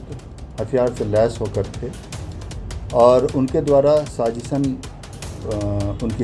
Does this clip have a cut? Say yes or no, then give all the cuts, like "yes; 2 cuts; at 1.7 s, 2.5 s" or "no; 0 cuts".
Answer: no; 0 cuts